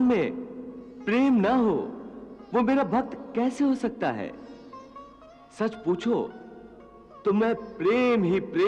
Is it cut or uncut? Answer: uncut